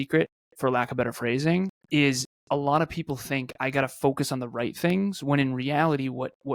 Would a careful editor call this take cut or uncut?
uncut